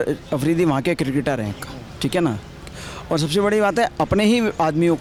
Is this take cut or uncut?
uncut